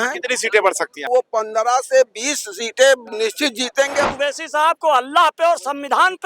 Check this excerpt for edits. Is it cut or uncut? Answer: cut